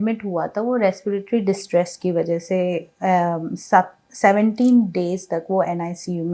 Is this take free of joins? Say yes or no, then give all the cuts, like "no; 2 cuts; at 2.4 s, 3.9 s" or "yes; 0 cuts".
yes; 0 cuts